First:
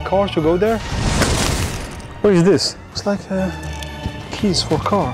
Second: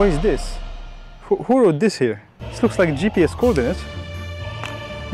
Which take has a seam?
first; 2 cuts; at 0.9 s, 2.8 s

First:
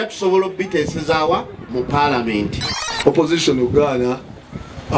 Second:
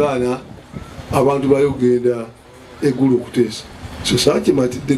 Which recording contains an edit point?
first; 1 cut; at 2.7 s

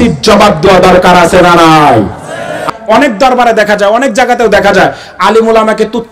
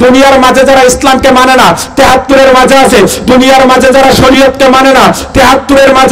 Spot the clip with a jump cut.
first; 1 cut; at 2.7 s

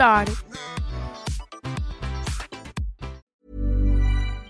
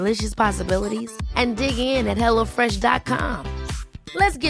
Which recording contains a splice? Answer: first; 1 cut; at 3.3 s

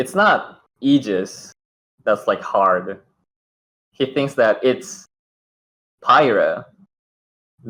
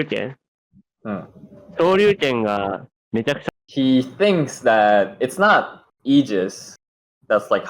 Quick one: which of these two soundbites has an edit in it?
second; 1 cut; at 3.4 s

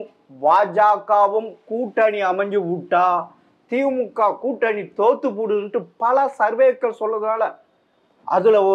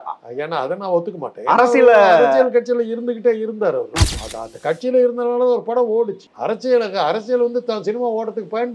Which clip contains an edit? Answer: second; 2 cuts; at 4.0 s, 6.3 s

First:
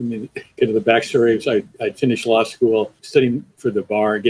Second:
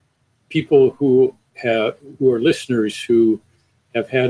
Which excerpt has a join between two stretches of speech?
first; 1 cut; at 3.2 s

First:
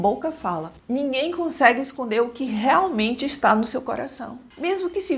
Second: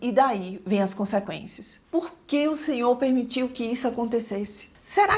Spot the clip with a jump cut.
second; 1 cut; at 1.7 s

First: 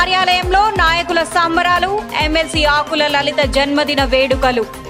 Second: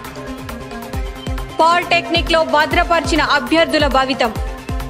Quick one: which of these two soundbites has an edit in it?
second; 1 cut; at 1.2 s

